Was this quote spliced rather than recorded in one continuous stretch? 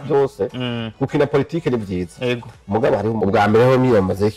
yes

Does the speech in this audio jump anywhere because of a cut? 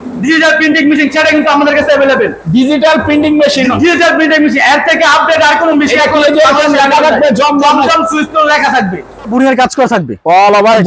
yes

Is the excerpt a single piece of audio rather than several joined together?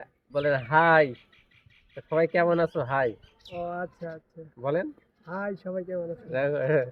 yes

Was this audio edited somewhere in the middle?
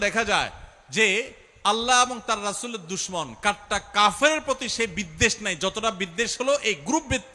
no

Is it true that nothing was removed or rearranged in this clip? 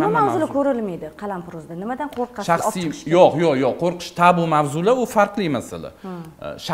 yes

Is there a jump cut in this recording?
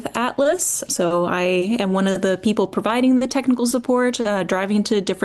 no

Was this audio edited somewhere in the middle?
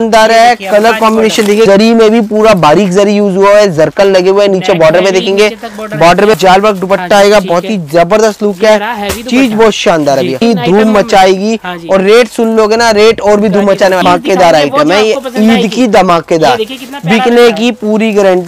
yes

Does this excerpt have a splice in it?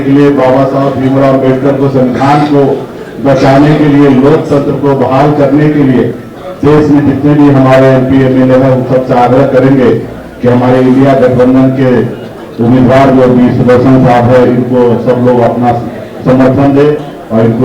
no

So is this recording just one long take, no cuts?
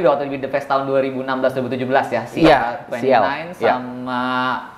yes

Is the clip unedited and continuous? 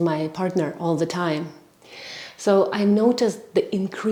yes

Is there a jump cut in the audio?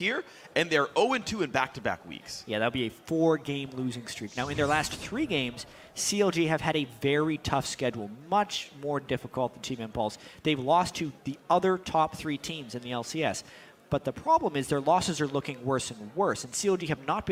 no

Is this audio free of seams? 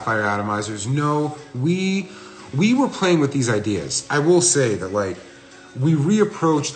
yes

